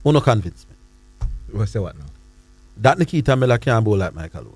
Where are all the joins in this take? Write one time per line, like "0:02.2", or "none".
none